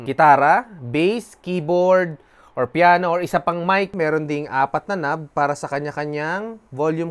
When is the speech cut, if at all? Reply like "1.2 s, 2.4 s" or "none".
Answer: 3.9 s